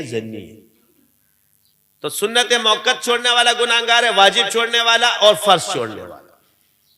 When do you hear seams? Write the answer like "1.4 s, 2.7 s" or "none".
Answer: 2.0 s